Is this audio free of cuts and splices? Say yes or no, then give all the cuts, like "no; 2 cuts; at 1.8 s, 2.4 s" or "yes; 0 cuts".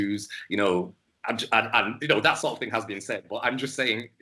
yes; 0 cuts